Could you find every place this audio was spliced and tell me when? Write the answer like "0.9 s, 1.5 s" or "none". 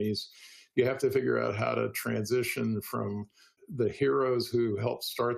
3.6 s